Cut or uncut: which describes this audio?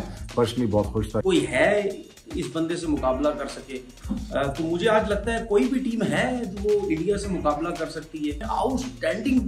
cut